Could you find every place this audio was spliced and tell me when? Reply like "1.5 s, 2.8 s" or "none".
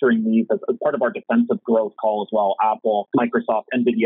3.1 s